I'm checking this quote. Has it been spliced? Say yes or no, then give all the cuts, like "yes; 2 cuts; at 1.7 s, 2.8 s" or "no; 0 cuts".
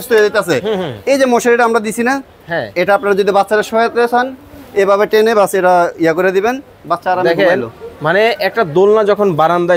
no; 0 cuts